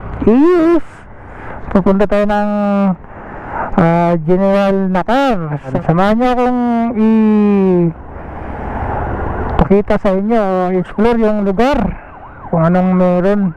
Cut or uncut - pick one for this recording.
uncut